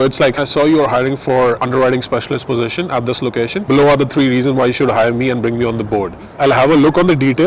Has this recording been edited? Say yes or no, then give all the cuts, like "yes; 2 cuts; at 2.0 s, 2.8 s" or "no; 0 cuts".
yes; 1 cut; at 6.2 s